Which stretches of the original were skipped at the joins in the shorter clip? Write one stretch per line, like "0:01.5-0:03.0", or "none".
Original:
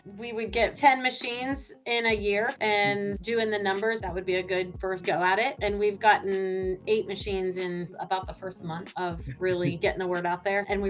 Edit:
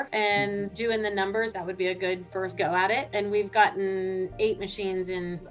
none